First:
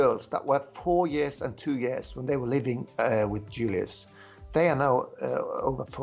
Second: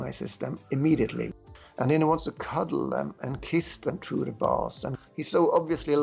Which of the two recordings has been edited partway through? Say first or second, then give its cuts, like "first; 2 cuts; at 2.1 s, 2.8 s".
second; 2 cuts; at 1.3 s, 4.9 s